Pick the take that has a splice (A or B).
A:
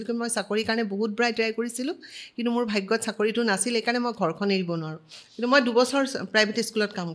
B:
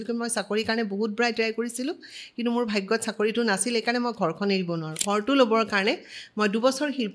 B